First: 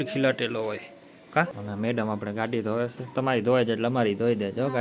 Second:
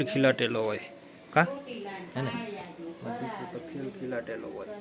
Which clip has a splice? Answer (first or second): first